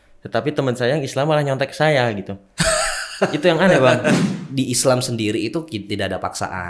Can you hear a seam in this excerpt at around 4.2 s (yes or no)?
yes